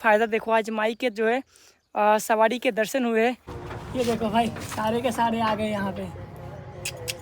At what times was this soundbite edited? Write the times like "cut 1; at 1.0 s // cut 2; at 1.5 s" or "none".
cut 1; at 3.6 s